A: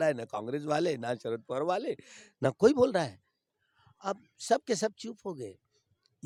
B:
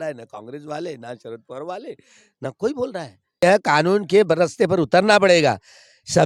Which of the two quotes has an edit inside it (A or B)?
B